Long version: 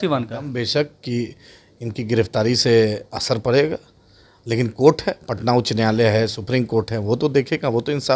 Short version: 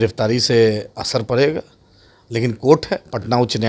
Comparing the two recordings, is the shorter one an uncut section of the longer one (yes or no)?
yes